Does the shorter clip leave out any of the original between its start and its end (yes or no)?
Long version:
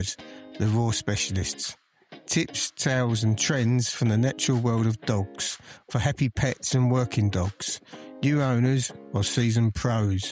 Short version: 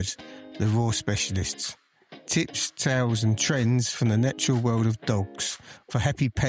no